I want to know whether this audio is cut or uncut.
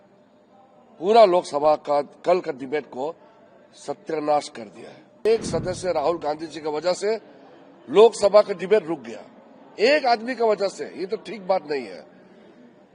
cut